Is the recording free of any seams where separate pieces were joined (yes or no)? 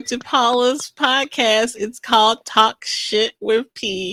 yes